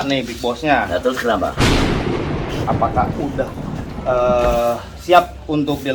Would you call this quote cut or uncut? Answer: cut